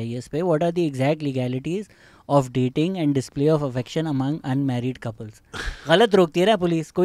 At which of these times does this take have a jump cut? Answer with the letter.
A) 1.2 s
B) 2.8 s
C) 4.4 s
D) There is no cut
D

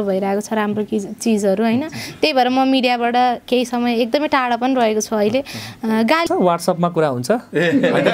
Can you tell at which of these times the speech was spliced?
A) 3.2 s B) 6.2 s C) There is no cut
B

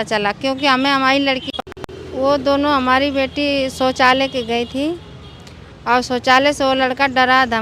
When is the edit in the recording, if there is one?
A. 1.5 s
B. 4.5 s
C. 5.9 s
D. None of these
A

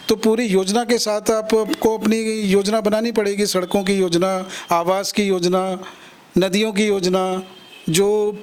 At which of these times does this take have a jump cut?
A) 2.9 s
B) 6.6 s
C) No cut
C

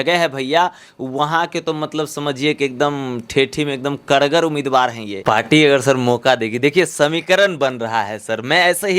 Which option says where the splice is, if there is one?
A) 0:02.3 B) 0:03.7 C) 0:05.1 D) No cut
C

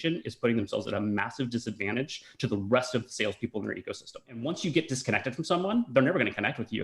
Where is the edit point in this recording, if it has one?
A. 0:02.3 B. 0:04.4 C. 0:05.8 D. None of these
B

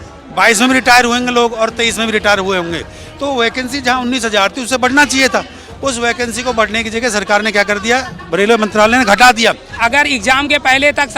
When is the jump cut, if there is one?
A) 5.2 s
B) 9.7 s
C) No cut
B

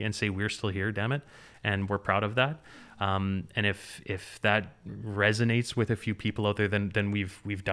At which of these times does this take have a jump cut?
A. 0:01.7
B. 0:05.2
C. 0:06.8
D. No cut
D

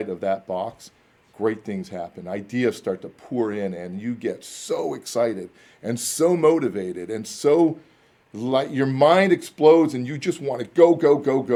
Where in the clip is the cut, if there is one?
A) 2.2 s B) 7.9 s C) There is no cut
C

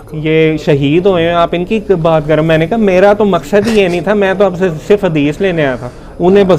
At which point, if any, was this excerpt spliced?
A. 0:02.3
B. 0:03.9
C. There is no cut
C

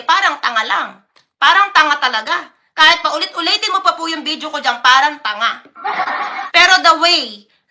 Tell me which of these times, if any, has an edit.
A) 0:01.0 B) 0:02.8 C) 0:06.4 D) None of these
C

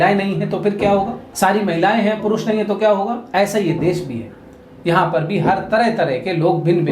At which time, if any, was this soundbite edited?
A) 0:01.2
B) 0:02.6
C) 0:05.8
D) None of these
A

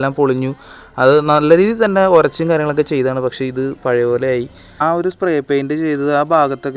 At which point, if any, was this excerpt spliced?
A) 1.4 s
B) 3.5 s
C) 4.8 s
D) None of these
C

